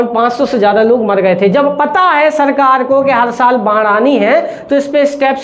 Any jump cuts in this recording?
no; 0 cuts

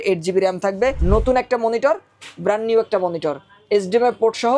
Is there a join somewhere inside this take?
yes; 1 cut; at 1.0 s

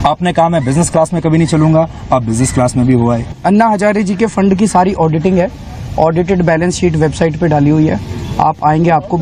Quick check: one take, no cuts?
no; 1 cut; at 3.4 s

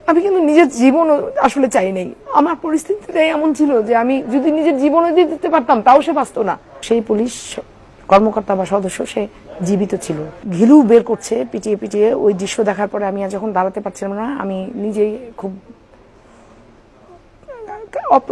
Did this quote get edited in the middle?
yes; 2 cuts; at 6.8 s, 10.4 s

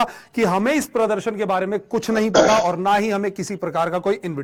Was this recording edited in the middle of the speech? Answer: no; 0 cuts

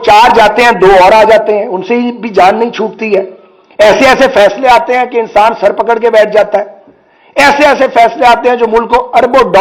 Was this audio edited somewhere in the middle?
no; 0 cuts

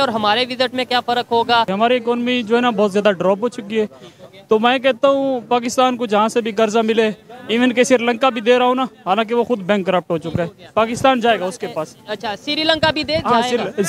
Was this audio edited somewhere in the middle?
yes; 1 cut; at 1.7 s

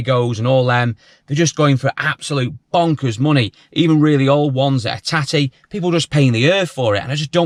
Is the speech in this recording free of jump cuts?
yes; 0 cuts

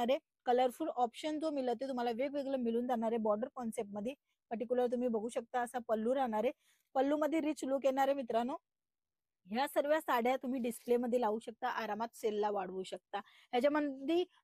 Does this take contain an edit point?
no; 0 cuts

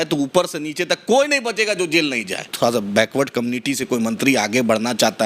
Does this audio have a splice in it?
yes; 1 cut; at 2.4 s

